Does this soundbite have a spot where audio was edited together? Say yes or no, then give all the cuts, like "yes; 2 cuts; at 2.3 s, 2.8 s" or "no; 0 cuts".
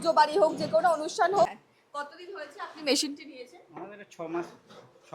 yes; 1 cut; at 1.5 s